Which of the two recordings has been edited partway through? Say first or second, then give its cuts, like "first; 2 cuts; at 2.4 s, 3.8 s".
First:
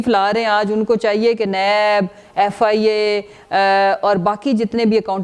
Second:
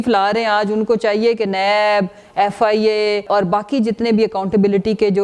second; 1 cut; at 3.3 s